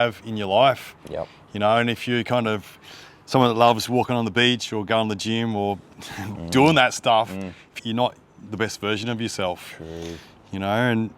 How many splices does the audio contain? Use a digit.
1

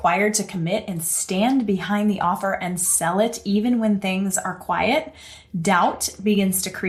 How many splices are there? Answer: 0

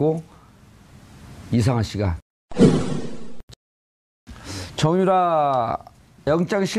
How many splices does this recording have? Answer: 1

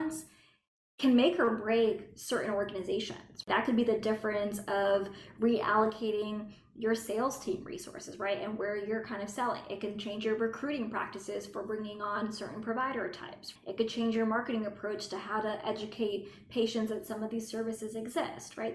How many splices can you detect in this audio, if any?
2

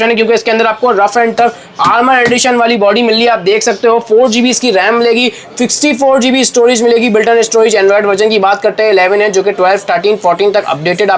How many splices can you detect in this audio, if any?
0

